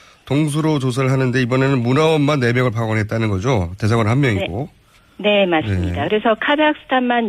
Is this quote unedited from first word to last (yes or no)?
no